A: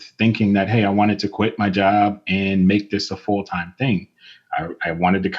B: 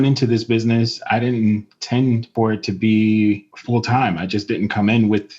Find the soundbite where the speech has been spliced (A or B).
B